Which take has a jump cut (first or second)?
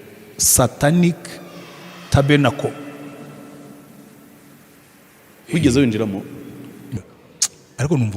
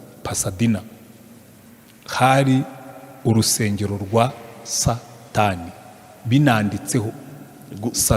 first